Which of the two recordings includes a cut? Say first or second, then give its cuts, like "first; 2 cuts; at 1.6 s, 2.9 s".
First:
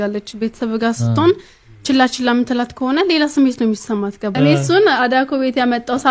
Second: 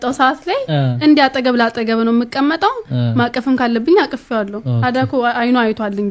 first; 1 cut; at 4.2 s